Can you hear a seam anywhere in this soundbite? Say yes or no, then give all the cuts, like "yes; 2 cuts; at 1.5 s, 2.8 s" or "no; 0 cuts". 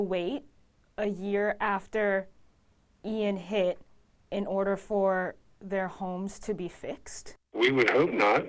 no; 0 cuts